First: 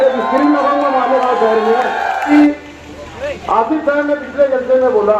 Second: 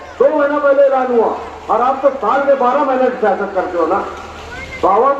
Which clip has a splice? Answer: first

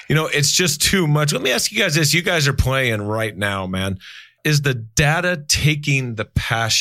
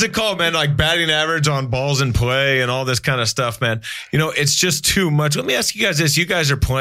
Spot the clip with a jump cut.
first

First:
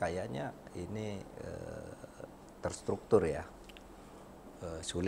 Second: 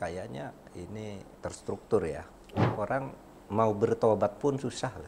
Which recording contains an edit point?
second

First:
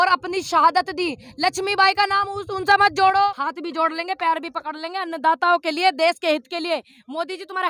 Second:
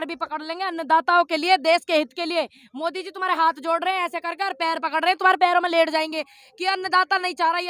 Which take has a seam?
first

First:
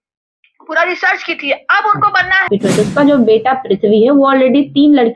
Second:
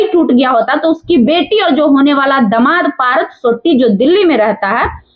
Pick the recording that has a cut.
first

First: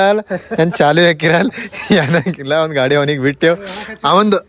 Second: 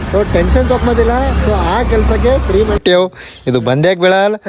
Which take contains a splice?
second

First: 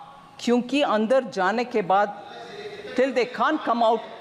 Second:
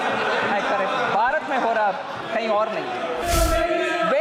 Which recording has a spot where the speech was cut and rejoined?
second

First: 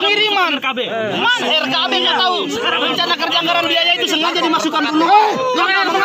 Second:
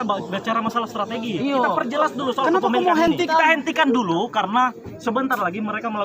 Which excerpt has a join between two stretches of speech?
second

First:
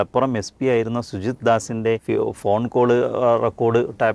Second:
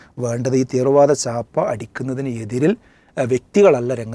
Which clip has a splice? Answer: first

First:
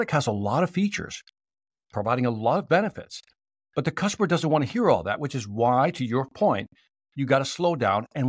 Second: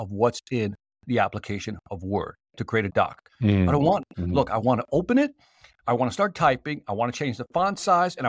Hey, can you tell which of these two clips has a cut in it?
second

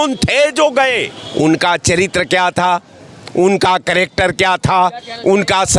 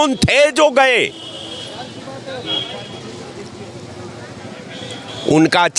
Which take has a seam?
first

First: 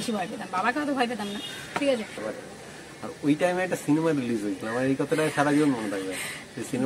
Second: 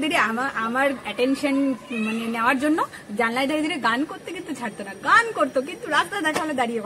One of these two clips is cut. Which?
first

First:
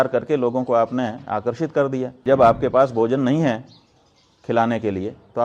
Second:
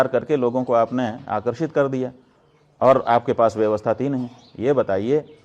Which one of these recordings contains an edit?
first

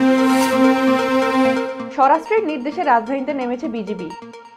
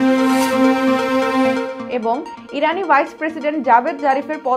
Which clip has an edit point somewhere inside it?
second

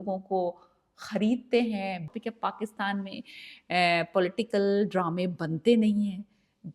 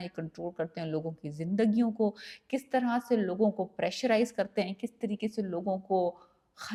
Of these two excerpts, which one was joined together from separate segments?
first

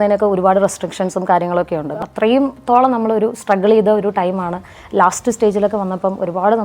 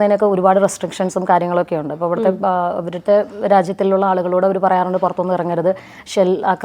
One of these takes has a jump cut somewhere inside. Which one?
first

